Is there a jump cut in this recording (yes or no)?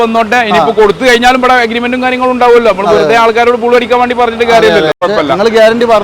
yes